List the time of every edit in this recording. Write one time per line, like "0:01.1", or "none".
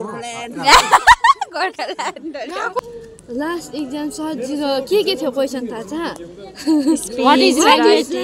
0:02.8